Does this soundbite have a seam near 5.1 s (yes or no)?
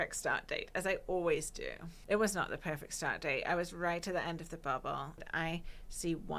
yes